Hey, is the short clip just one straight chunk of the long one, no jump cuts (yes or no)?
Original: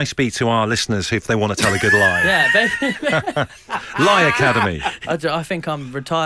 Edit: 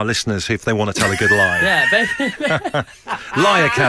yes